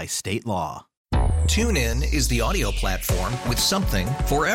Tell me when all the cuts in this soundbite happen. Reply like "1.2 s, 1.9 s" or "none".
0.9 s